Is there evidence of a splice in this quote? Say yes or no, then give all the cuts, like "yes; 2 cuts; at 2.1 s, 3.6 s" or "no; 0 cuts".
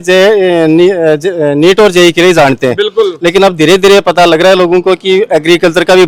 no; 0 cuts